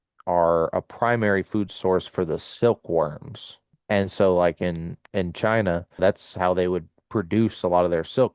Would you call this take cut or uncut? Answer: cut